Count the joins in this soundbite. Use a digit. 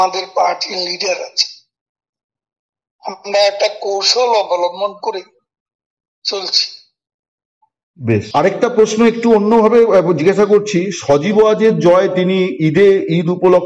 1